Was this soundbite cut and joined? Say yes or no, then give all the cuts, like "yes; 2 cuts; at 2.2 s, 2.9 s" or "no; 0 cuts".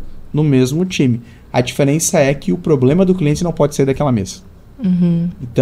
no; 0 cuts